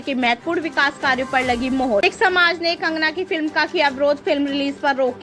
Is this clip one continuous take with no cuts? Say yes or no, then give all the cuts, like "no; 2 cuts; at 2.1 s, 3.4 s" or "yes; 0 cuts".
no; 1 cut; at 2.0 s